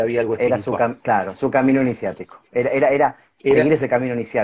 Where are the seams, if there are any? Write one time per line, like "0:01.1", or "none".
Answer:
none